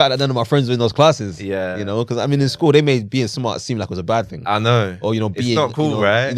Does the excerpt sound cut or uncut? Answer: uncut